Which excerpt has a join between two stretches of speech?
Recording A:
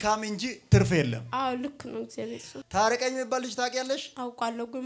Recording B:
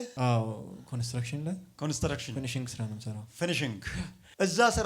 A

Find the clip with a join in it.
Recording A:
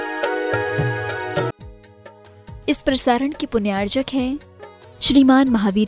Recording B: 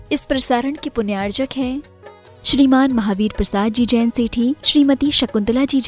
A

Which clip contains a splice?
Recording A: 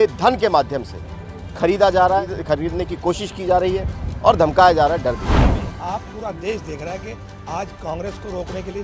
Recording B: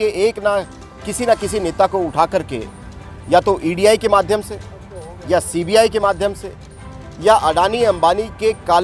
A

